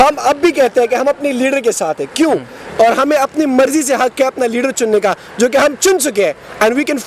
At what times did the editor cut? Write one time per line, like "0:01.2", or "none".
0:02.6